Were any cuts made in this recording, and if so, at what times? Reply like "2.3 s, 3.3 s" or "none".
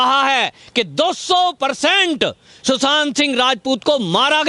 none